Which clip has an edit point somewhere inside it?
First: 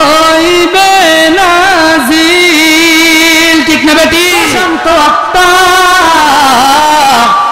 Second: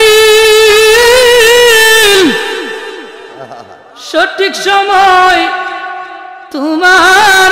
first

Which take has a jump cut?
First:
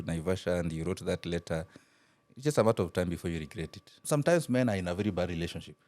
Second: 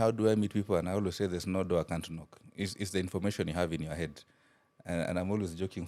first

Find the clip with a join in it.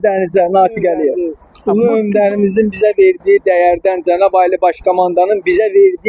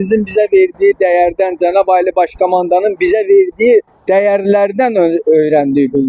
first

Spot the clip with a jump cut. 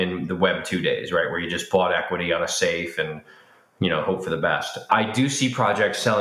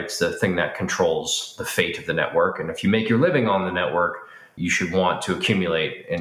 second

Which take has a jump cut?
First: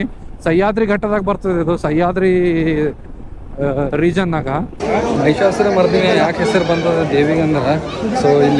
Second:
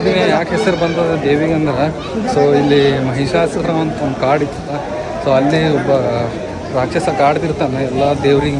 first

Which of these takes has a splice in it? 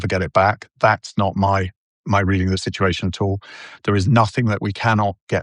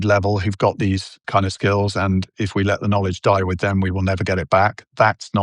second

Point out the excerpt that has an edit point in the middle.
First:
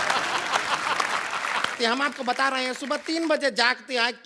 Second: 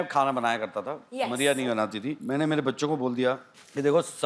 first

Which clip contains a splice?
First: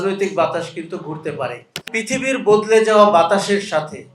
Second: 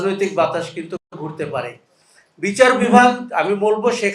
first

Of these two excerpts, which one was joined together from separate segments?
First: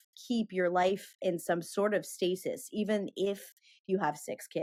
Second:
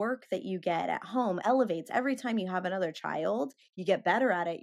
second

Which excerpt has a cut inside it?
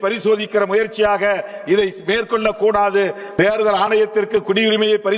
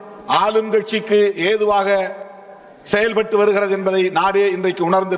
first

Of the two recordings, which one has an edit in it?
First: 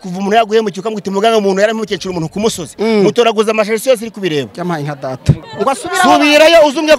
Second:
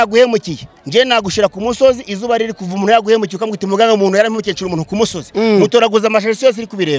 first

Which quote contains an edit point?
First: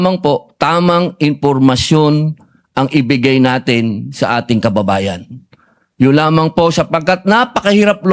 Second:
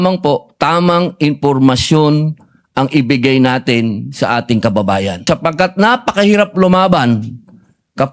second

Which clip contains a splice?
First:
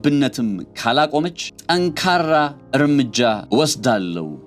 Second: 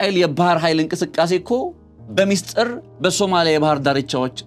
first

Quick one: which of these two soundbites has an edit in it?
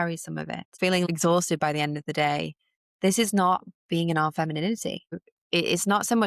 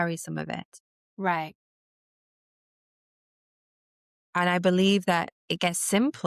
first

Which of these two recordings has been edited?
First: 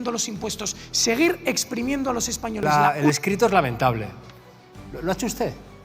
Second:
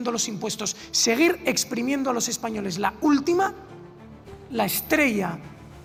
first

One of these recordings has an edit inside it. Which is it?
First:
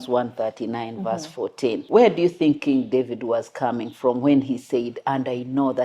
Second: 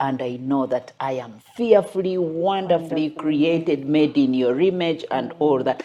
first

